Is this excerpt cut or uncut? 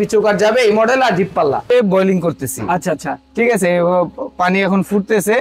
cut